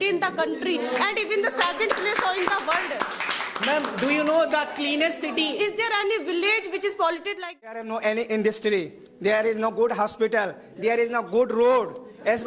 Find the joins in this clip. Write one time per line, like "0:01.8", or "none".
0:07.8